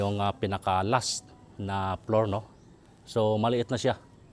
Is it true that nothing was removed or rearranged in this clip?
yes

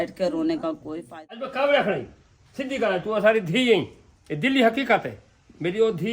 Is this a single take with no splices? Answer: no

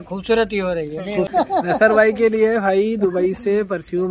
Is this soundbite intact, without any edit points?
no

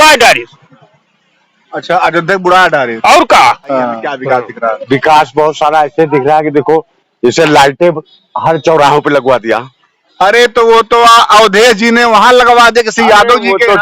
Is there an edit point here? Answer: yes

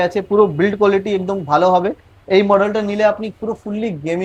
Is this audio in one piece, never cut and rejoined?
yes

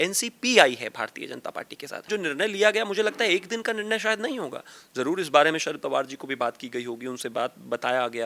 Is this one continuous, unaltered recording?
no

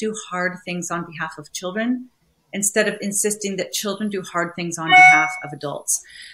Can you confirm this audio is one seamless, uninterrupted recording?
yes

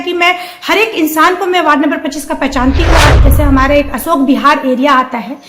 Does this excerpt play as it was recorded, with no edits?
no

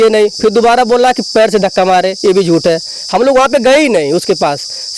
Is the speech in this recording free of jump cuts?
yes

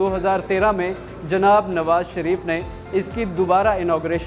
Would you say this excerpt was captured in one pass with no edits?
yes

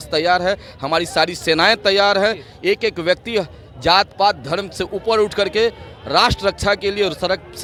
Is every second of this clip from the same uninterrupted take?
yes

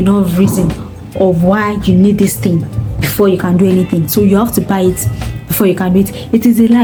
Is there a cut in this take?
no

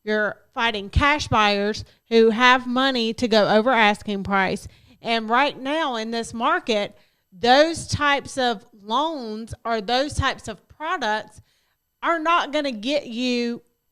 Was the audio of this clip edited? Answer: no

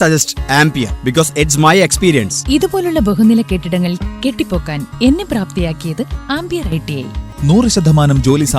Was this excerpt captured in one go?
no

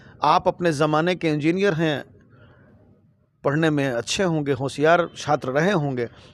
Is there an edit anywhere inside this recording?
no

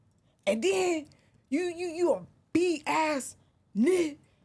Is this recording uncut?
yes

